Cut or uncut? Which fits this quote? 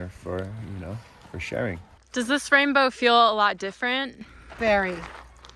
cut